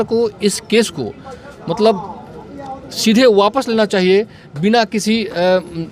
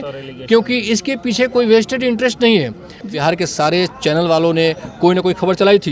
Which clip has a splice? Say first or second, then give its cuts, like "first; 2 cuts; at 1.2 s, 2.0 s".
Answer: second; 1 cut; at 3.0 s